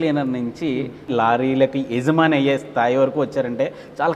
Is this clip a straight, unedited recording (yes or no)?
no